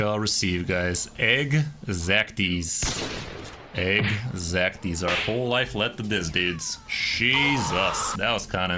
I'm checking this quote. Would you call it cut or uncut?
uncut